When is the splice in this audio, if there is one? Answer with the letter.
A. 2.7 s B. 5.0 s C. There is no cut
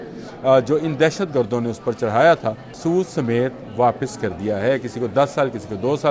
A